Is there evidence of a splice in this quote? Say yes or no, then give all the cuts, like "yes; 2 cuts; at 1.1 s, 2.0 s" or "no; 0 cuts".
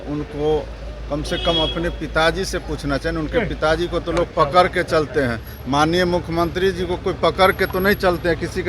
no; 0 cuts